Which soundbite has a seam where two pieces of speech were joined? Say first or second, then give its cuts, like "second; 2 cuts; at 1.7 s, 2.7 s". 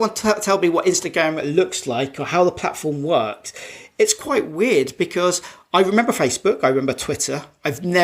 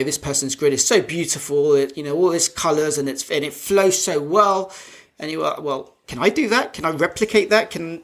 second; 1 cut; at 6.1 s